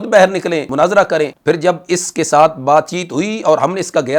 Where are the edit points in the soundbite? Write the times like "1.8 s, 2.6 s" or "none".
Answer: 0.9 s